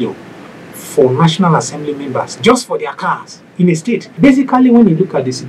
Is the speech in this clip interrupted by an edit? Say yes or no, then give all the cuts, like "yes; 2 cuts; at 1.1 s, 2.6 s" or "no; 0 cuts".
yes; 1 cut; at 4.2 s